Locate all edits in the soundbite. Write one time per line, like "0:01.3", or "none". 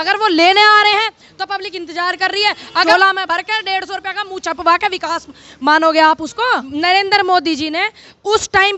0:02.9
0:06.5

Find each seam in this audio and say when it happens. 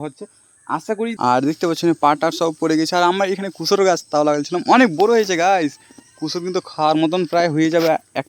0:01.1

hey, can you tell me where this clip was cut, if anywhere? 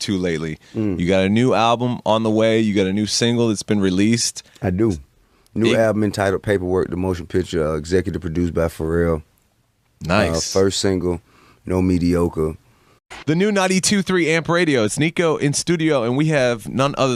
none

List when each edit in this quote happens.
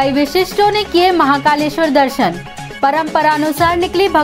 none

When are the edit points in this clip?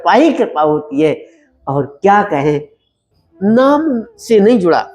0:02.9

